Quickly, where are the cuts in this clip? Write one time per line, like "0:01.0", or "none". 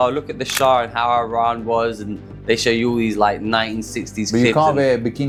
none